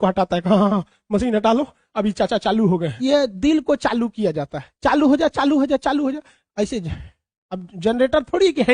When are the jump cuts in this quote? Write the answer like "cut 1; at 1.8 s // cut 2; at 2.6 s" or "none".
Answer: cut 1; at 2.9 s